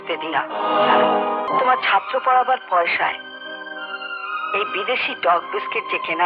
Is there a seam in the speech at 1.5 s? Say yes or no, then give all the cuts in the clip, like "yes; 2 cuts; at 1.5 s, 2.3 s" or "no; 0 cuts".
yes; 1 cut; at 1.5 s